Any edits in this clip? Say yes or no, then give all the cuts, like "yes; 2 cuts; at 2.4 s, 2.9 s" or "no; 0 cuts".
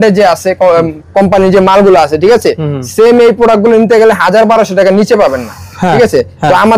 no; 0 cuts